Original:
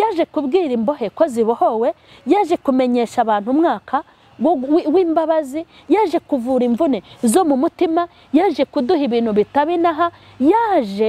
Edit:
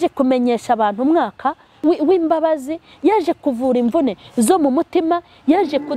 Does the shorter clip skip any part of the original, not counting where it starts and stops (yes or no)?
yes